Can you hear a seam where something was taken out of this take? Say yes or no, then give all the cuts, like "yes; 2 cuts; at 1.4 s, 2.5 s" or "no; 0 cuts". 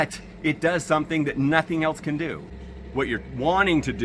yes; 1 cut; at 2.5 s